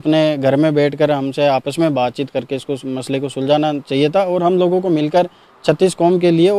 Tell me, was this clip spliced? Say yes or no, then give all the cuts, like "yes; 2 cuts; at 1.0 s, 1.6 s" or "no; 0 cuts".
no; 0 cuts